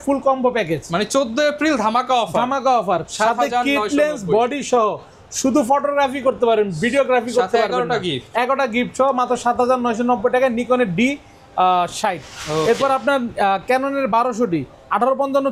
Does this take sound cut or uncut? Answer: uncut